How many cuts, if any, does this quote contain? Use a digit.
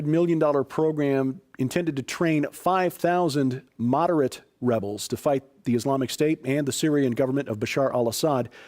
1